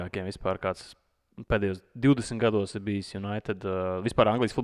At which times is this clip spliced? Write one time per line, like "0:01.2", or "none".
none